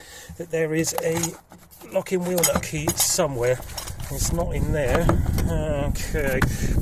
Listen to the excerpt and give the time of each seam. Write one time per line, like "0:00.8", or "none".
none